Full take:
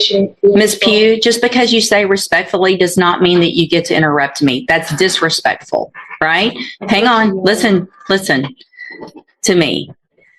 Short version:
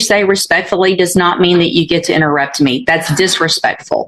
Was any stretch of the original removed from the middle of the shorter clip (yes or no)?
no